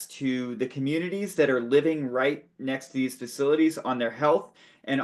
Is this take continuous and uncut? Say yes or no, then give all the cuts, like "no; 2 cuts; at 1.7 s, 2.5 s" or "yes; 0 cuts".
yes; 0 cuts